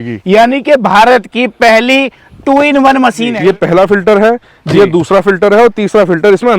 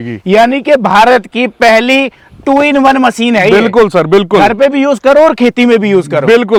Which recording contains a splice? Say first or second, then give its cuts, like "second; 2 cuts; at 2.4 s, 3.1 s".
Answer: first; 1 cut; at 3.3 s